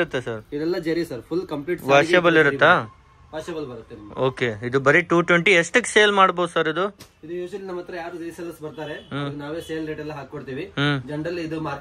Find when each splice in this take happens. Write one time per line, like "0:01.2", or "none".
none